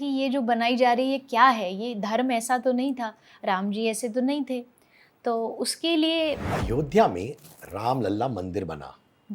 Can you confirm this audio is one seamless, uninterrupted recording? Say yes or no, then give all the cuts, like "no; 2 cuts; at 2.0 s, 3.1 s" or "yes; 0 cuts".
no; 1 cut; at 6.5 s